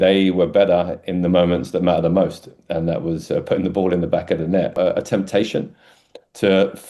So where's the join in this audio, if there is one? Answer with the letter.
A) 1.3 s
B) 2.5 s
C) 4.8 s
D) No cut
C